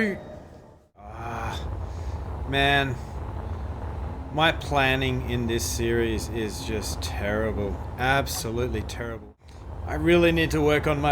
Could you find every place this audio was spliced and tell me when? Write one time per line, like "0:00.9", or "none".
0:01.2
0:09.2

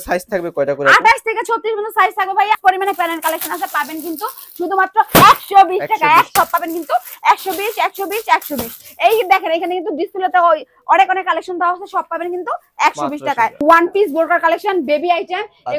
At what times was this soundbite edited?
0:02.6
0:06.3
0:13.6

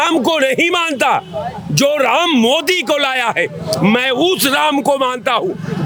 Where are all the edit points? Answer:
none

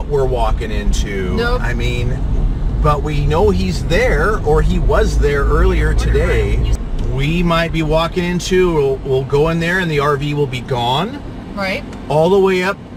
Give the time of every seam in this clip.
none

